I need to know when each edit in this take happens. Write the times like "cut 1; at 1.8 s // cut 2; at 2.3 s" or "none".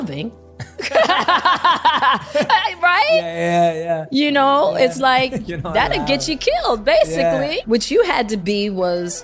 cut 1; at 7.6 s // cut 2; at 8.4 s